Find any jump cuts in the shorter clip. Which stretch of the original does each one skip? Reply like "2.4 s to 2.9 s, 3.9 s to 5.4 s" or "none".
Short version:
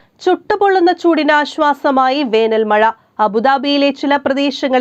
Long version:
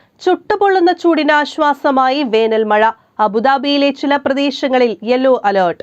none